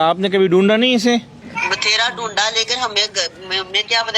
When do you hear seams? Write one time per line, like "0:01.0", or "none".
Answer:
0:01.4